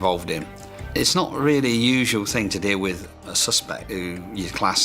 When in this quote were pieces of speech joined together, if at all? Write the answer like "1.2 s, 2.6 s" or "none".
4.0 s